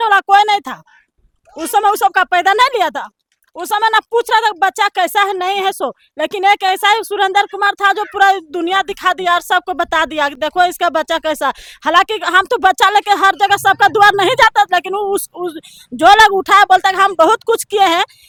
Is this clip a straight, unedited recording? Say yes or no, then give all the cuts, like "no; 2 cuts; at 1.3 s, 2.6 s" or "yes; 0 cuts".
yes; 0 cuts